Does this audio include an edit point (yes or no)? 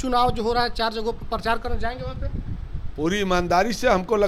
no